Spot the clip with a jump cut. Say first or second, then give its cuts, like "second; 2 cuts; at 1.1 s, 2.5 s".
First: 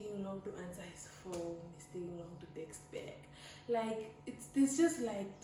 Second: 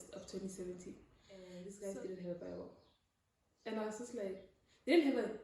second; 1 cut; at 1.5 s